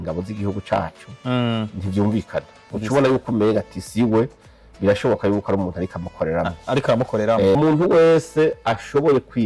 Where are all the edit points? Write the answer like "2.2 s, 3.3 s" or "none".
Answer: 7.6 s